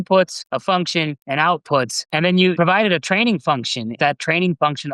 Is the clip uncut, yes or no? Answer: no